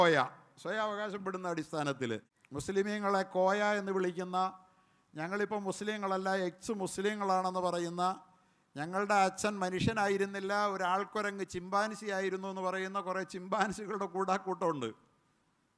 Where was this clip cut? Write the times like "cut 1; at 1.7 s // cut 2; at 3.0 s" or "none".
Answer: cut 1; at 2.4 s